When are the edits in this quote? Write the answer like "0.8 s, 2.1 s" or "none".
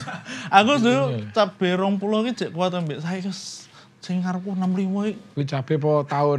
5.3 s